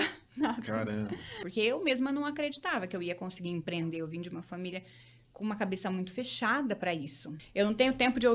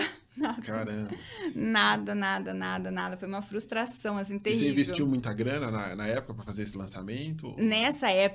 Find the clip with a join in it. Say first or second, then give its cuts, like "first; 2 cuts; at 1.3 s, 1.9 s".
first; 2 cuts; at 1.4 s, 7.4 s